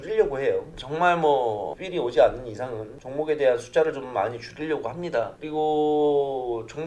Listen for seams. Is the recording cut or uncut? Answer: uncut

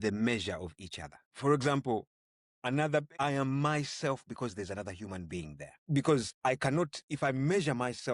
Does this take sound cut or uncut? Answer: cut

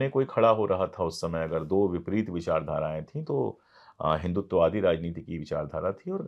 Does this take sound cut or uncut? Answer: uncut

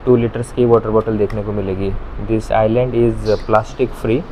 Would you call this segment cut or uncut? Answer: uncut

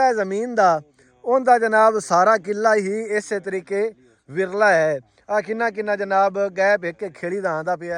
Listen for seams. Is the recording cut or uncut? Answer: uncut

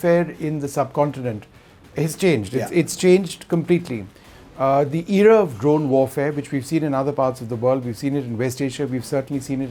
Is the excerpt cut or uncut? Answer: uncut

